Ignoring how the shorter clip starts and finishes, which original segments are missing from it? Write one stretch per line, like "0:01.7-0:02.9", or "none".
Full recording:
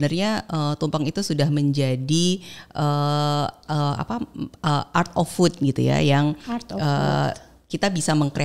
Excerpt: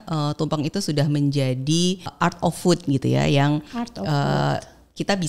0:02.5-0:04.9

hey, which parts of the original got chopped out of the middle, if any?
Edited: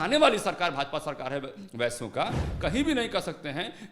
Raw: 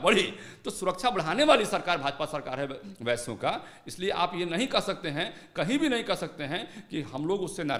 0:03.7-0:05.4

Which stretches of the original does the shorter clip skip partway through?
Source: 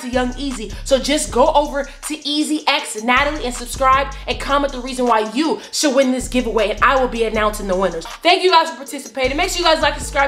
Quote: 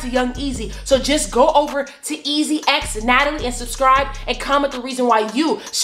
none

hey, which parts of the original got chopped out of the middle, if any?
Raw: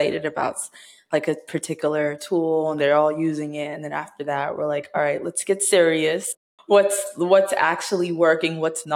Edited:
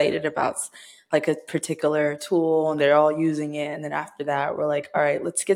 none

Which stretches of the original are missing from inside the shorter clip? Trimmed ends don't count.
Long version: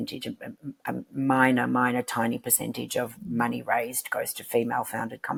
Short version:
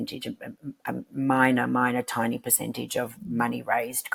none

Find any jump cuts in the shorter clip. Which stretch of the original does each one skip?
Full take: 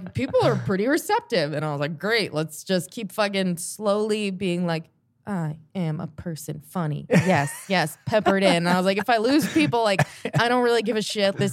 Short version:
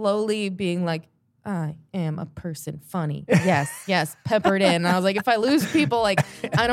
none

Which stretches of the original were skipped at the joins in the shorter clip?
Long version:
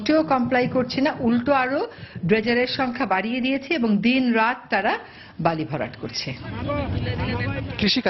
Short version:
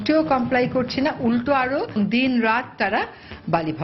0:02.0-0:03.9

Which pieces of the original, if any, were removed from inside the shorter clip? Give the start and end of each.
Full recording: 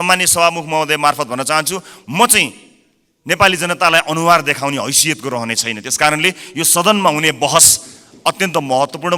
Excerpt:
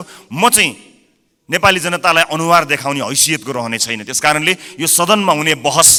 none

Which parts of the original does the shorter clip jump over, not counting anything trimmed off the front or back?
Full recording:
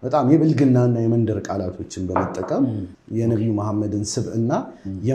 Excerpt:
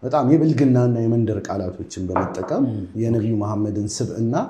0:02.8-0:03.0

